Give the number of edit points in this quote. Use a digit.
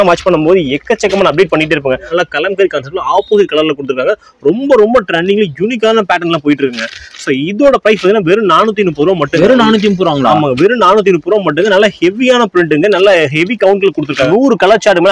2